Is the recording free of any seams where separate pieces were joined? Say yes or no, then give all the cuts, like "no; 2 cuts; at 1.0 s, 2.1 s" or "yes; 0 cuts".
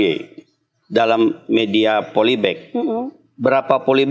yes; 0 cuts